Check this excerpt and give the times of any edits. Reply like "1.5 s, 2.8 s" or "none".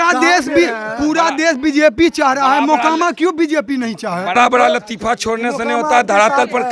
4.3 s